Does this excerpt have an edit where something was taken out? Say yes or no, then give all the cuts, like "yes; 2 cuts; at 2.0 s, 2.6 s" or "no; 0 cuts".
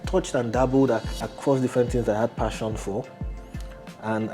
no; 0 cuts